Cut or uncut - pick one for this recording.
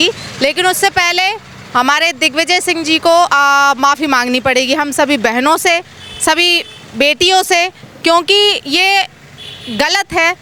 uncut